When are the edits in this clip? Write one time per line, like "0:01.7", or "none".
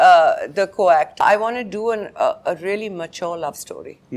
0:01.1